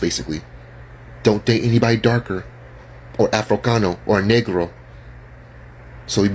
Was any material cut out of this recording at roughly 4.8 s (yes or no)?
no